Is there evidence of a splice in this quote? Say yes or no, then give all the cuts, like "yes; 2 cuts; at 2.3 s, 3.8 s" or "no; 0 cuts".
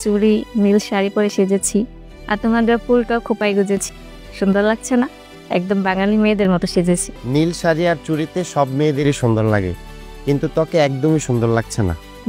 no; 0 cuts